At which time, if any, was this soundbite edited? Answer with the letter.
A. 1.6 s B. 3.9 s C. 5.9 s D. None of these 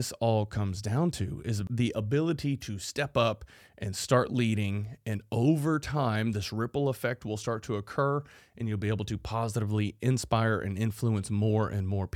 A